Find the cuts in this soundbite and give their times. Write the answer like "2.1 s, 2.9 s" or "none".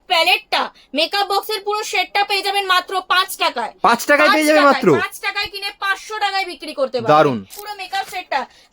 7.5 s